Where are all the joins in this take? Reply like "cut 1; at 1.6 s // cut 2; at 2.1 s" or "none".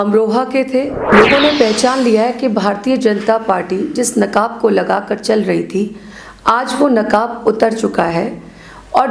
cut 1; at 1.0 s